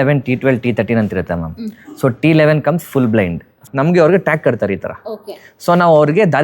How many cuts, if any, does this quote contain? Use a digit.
1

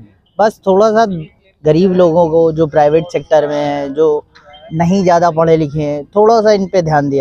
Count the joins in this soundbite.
0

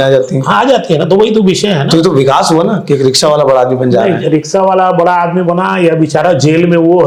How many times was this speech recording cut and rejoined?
0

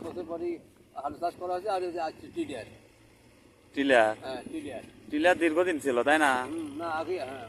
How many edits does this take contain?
0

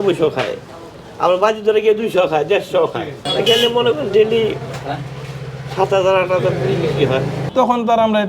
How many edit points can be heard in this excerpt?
2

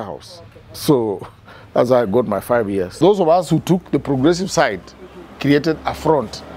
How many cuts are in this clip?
1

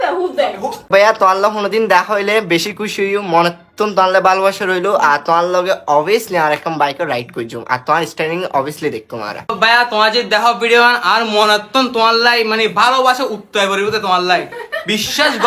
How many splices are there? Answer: 2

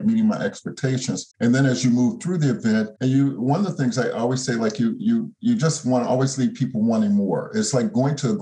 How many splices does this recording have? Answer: 2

